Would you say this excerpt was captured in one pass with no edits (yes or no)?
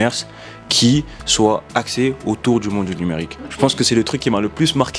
no